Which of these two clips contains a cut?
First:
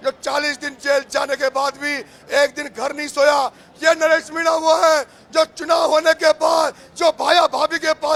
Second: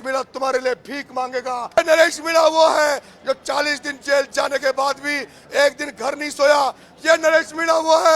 second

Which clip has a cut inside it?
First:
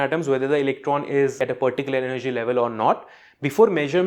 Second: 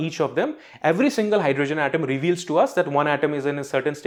first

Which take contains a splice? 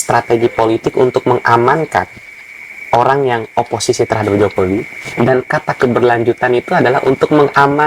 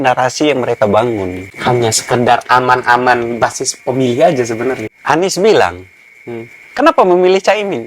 second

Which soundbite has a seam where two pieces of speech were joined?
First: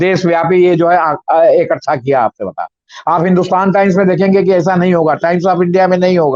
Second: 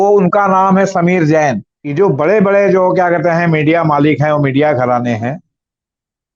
second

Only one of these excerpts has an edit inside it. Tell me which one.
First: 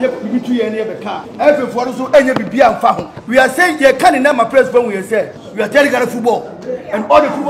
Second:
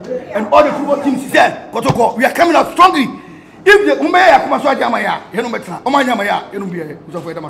first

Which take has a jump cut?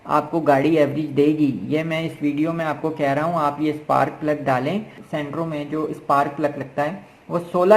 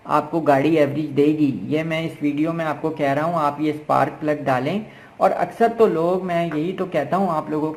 first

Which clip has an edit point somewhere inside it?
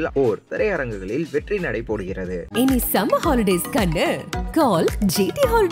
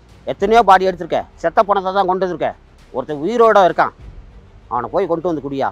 second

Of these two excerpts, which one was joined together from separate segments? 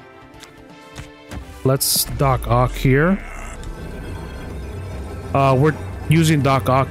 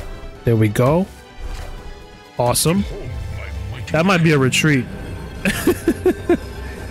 first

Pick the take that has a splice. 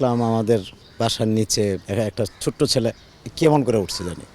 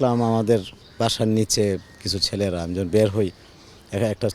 first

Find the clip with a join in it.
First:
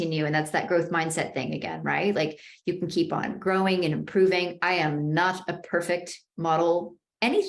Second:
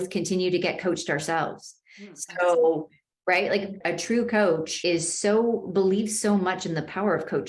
second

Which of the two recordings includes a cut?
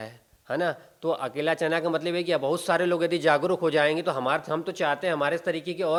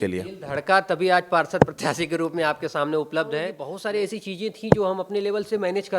second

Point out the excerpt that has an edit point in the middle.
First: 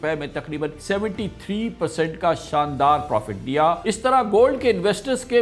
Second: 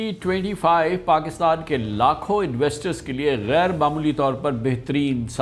first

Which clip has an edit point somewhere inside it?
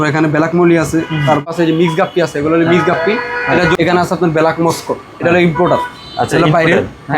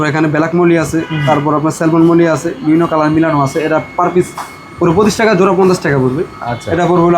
first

